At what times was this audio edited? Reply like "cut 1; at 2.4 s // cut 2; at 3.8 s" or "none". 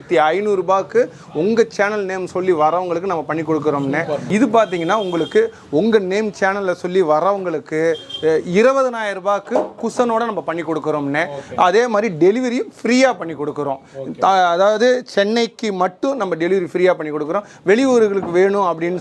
none